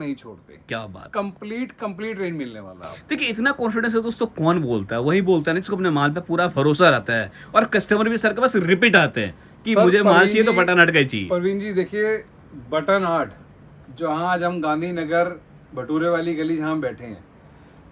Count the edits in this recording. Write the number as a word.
zero